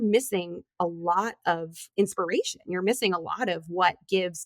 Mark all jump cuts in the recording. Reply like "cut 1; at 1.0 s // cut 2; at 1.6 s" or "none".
cut 1; at 1.8 s